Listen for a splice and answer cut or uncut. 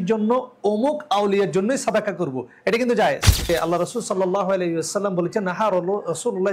cut